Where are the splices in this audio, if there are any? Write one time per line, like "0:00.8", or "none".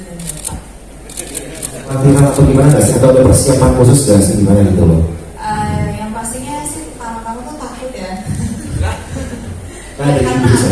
0:02.0

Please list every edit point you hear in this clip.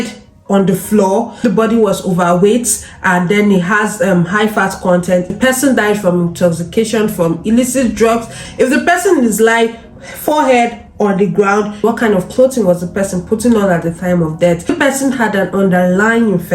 0:01.4
0:05.3
0:08.4
0:11.8
0:14.7

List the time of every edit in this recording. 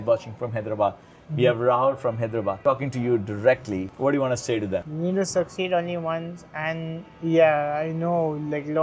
0:04.9

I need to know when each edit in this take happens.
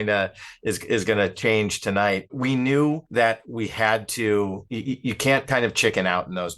0:02.3
0:03.0
0:04.7

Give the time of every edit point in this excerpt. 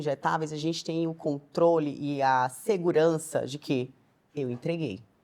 none

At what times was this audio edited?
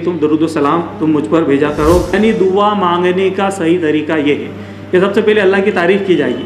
0:02.1

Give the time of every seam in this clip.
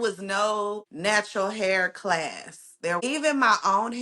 0:00.9
0:03.0

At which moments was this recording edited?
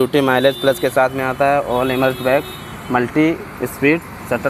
none

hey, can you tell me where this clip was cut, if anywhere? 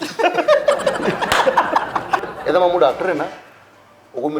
0:02.2

